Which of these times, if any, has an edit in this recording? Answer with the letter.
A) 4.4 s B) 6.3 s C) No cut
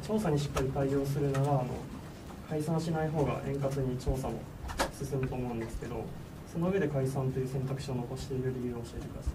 C